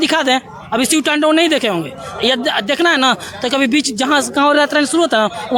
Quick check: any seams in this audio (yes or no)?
no